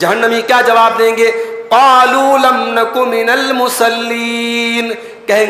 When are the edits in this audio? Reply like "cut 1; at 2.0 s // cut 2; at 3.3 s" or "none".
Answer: none